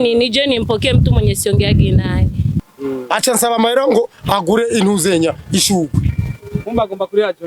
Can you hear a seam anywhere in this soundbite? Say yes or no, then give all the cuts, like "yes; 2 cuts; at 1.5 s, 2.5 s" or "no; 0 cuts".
yes; 1 cut; at 2.6 s